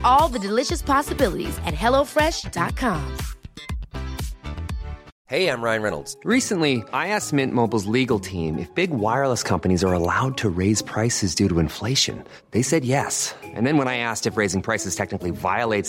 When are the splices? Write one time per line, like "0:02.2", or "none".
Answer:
0:05.1